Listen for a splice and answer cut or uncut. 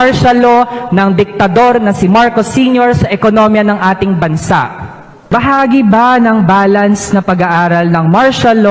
cut